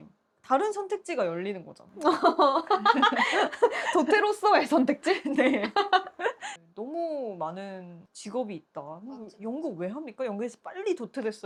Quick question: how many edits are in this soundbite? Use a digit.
0